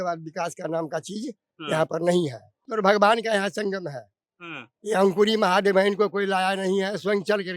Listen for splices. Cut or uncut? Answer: cut